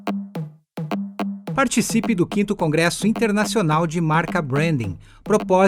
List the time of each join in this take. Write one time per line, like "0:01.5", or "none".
0:01.1